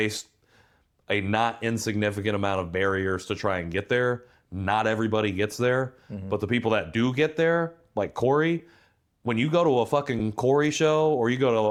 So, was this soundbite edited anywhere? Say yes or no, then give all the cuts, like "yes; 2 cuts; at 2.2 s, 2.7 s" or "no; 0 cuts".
no; 0 cuts